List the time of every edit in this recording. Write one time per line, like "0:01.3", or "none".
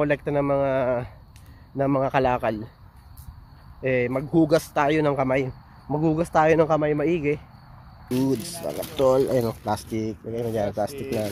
0:08.0